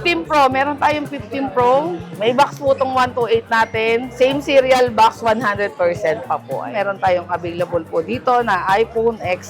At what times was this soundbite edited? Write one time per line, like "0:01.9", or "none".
0:02.1
0:04.1
0:06.7